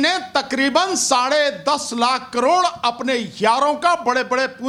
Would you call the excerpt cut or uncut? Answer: uncut